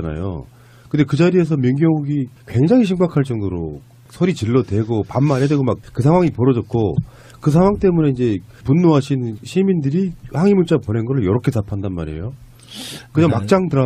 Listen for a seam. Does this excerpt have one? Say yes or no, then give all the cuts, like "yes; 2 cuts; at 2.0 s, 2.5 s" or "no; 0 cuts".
no; 0 cuts